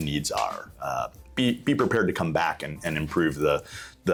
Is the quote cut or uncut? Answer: uncut